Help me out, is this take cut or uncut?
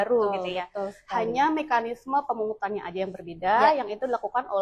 uncut